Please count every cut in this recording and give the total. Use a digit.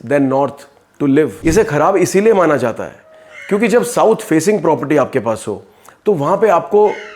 1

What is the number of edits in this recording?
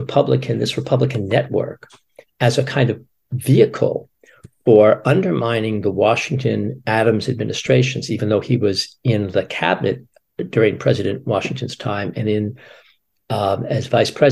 0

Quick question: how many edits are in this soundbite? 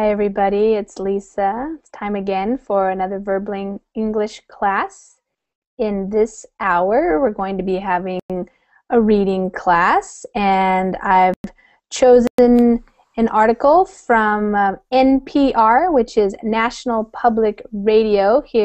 0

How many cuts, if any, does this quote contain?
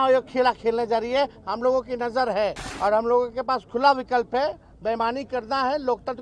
1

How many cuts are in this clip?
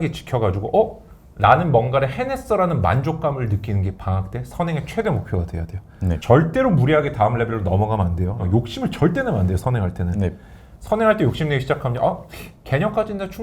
2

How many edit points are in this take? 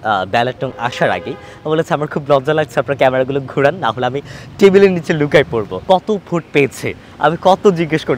1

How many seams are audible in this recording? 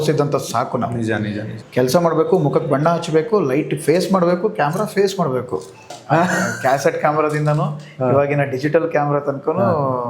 2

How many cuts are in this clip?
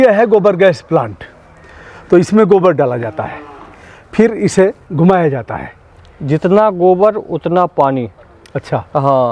0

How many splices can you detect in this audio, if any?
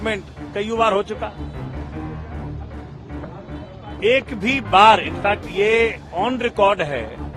2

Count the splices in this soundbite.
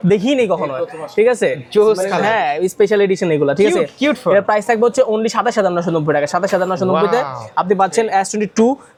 0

